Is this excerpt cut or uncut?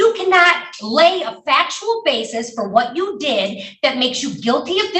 uncut